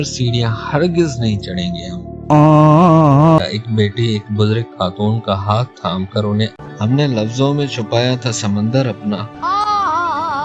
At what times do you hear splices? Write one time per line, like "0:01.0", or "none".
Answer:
0:03.4
0:06.5

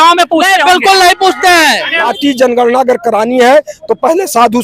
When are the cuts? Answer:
0:02.1

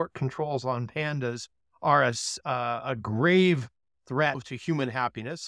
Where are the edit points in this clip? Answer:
0:02.3
0:04.5

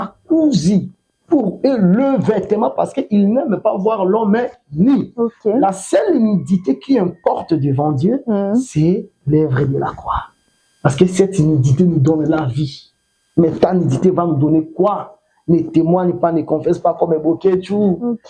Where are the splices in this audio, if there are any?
none

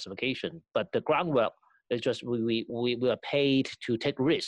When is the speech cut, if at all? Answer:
0:02.7

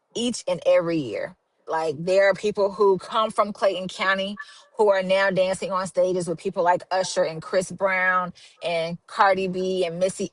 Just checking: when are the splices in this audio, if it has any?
0:01.7

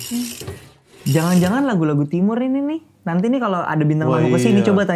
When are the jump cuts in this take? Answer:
0:01.0

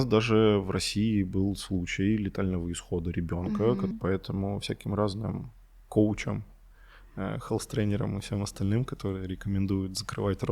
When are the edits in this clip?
0:03.9

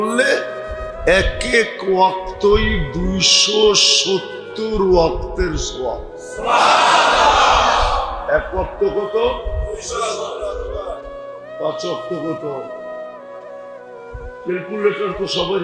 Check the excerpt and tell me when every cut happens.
none

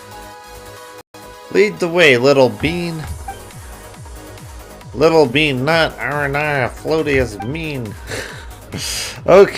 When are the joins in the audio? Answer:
0:01.0

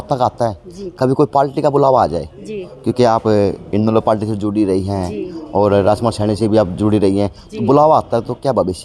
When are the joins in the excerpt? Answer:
none

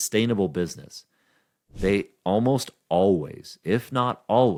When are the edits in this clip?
none

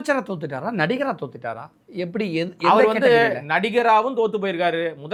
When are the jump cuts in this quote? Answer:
none

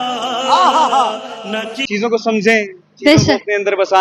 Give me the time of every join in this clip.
0:01.2

